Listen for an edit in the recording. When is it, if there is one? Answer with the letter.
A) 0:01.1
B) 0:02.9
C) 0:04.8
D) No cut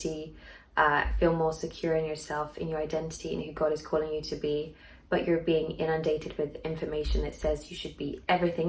D